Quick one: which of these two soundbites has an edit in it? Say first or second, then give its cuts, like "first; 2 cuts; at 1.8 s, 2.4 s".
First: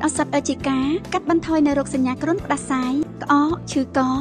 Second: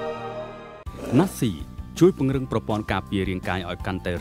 second; 1 cut; at 0.9 s